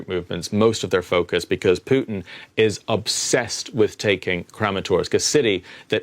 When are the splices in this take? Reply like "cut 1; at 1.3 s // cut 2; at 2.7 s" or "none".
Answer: none